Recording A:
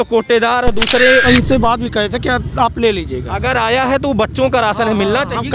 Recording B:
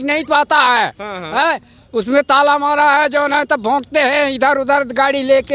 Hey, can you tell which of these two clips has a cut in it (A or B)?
A